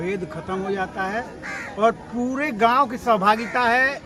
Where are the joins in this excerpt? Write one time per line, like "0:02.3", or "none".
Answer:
none